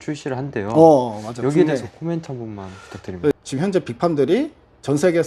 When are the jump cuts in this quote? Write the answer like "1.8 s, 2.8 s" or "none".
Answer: 3.3 s